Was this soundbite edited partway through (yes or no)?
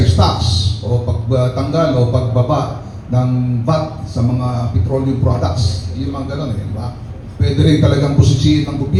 no